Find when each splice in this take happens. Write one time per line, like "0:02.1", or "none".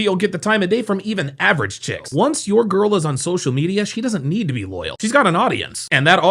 0:02.0